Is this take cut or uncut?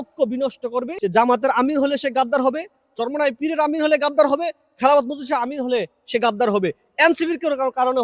cut